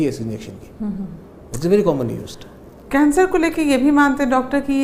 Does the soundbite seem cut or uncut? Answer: uncut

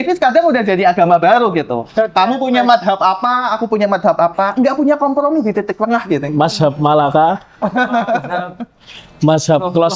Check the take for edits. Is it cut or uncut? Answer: uncut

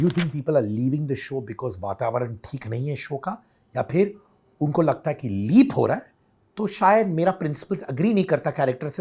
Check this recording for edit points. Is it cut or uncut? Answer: uncut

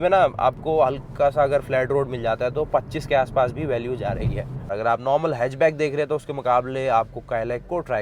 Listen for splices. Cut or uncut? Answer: cut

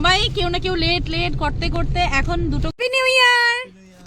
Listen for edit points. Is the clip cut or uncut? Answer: cut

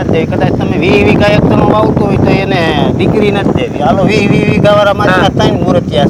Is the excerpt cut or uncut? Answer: uncut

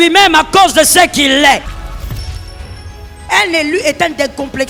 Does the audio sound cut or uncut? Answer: uncut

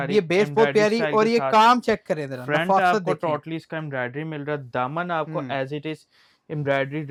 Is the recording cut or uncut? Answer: uncut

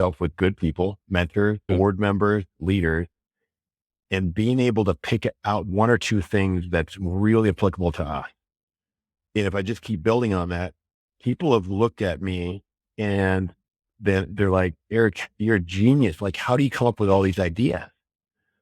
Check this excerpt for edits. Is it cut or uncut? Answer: cut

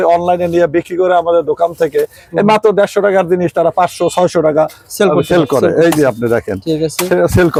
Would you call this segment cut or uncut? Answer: uncut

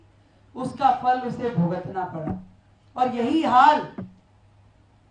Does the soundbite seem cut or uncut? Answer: uncut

